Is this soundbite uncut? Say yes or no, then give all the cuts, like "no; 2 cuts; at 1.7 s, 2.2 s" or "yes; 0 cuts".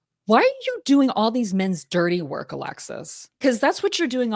no; 1 cut; at 3.4 s